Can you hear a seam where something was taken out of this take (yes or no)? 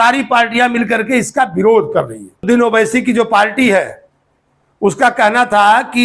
yes